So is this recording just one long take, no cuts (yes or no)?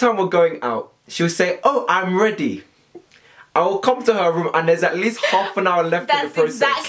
yes